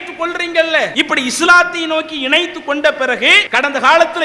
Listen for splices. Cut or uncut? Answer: cut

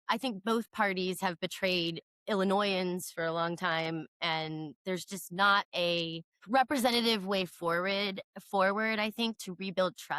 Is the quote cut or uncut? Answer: cut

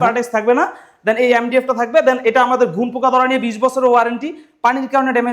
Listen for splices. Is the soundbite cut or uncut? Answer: uncut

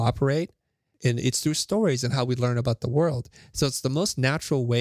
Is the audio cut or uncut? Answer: cut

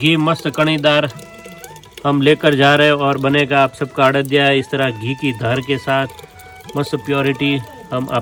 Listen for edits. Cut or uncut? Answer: uncut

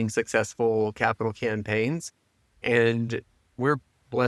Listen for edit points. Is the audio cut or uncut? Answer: uncut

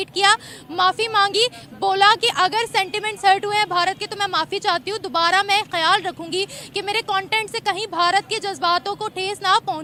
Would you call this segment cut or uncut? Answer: uncut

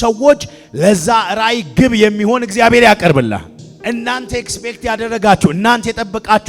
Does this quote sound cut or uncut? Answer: cut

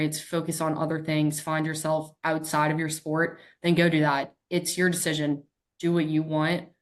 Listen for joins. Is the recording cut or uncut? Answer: uncut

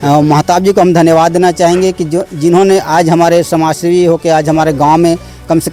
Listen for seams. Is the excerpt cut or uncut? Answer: uncut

